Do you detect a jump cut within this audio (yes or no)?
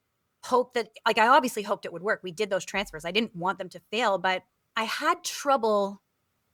no